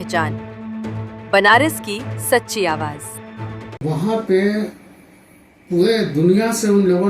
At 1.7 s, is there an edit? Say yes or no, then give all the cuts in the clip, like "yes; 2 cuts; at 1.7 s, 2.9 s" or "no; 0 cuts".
no; 1 cut; at 3.8 s